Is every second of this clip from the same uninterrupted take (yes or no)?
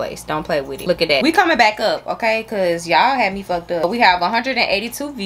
yes